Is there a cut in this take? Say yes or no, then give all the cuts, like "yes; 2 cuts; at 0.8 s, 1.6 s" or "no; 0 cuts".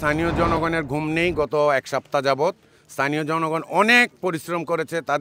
no; 0 cuts